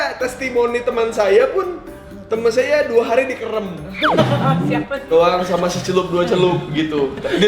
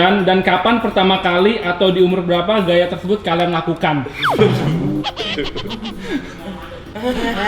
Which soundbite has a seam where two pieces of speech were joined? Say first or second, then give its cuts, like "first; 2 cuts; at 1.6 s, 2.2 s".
first; 1 cut; at 4.8 s